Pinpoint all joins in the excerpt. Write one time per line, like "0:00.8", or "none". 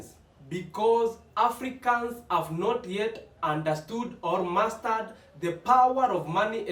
none